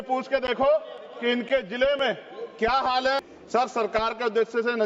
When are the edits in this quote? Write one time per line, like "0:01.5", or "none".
0:03.3